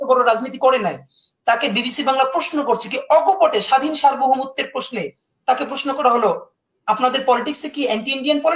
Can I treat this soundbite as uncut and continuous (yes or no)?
yes